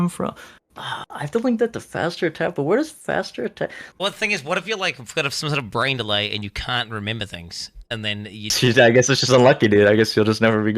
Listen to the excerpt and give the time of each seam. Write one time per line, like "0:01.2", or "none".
0:03.8
0:08.5